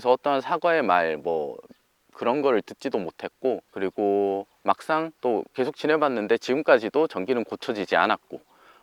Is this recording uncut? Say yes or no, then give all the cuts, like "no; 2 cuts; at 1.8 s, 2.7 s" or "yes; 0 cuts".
yes; 0 cuts